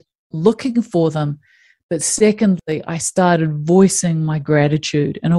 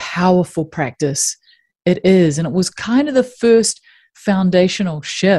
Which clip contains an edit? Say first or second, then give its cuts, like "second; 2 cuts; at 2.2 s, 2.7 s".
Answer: first; 1 cut; at 2.6 s